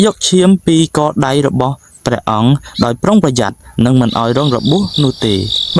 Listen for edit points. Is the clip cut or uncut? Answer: uncut